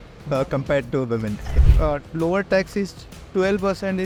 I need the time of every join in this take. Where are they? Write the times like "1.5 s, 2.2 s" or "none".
none